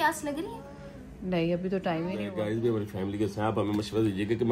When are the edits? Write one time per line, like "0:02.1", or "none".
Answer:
0:02.3

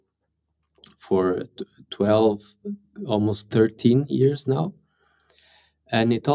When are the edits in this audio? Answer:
none

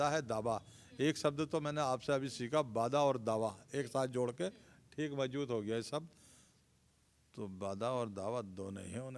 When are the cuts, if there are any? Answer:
none

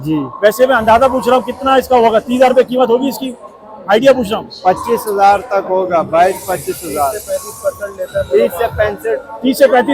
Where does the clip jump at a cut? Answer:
none

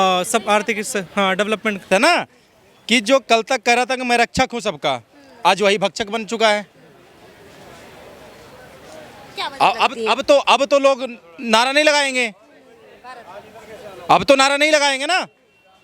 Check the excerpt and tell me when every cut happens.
0:01.9

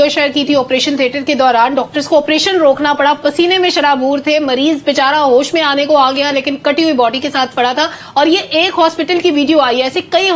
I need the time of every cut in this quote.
none

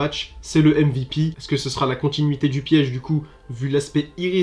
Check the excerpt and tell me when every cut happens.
0:01.4

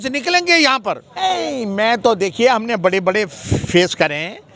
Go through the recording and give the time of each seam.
none

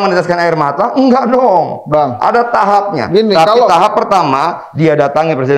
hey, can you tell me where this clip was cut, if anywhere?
none

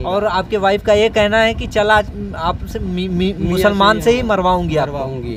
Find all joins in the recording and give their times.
none

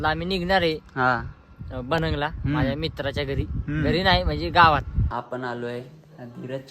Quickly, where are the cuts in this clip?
0:05.0

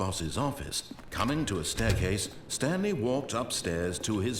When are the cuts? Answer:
0:01.1

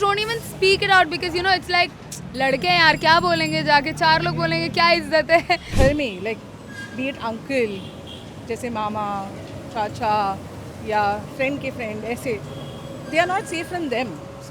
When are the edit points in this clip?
0:05.7

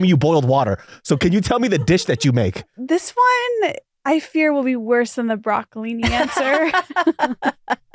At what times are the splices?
0:02.8

